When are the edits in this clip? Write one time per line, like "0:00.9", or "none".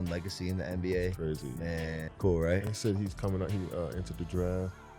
none